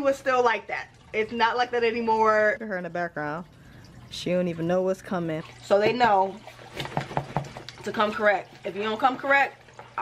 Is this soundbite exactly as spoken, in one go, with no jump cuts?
no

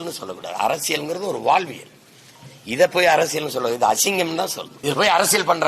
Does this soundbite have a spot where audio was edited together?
yes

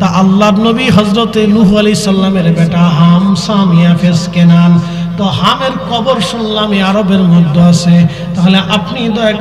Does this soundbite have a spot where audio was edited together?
no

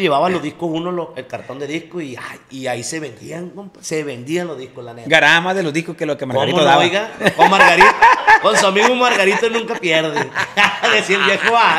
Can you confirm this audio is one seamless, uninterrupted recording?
yes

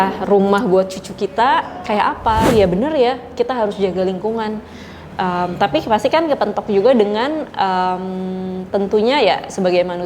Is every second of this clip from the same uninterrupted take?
no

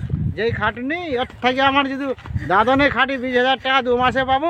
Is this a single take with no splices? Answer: yes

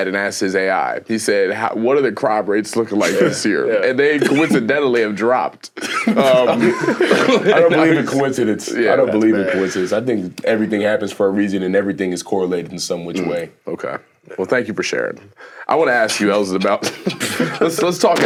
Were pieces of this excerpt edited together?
no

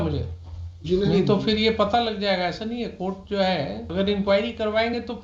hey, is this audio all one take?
no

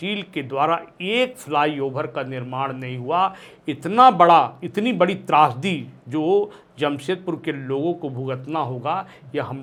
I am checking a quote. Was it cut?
no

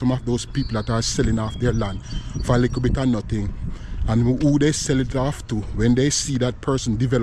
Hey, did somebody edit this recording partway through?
no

